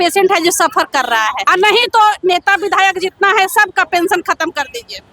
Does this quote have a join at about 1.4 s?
yes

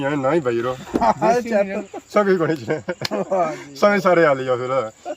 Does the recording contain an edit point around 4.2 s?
no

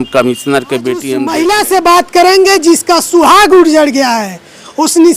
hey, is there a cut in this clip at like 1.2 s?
yes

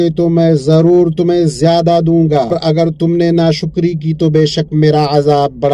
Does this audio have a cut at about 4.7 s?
no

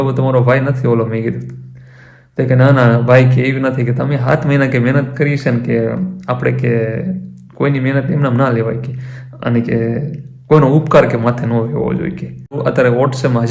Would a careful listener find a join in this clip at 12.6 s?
yes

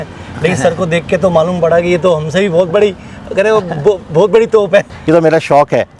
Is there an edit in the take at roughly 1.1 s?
no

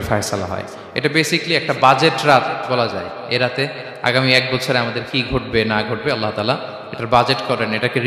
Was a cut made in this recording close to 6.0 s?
no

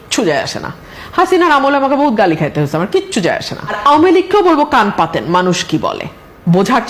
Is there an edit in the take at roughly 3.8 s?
yes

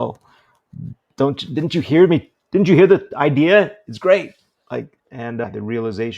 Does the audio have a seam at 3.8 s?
no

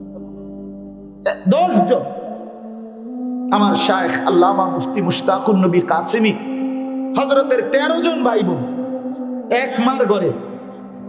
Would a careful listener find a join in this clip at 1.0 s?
yes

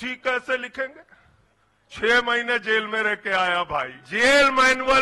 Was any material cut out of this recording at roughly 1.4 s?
no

